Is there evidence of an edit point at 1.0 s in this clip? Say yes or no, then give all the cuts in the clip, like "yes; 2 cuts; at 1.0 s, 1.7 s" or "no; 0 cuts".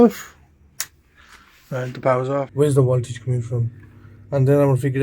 no; 1 cut; at 2.5 s